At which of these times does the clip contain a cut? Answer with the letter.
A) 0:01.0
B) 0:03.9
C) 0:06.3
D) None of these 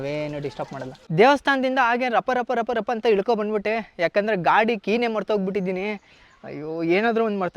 A